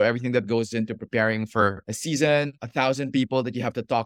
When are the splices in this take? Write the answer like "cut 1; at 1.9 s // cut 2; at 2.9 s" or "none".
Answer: none